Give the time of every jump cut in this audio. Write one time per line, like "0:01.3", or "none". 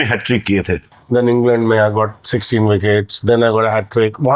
0:00.9